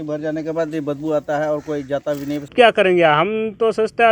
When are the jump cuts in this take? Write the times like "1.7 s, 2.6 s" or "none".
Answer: 2.5 s